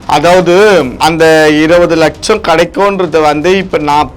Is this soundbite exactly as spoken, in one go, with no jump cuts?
no; 1 cut; at 0.9 s

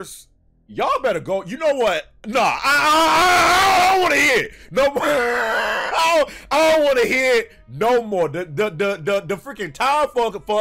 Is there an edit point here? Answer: no; 0 cuts

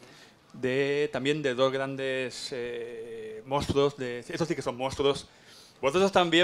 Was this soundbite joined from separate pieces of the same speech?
no; 0 cuts

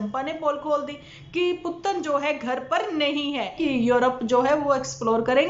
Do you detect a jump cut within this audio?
yes; 1 cut; at 3.6 s

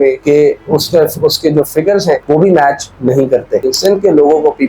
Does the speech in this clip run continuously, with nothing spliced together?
no; 1 cut; at 3.6 s

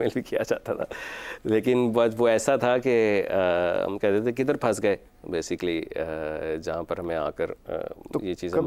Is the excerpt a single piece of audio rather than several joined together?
yes; 0 cuts

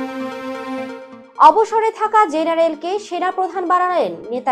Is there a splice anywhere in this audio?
yes; 1 cut; at 1.1 s

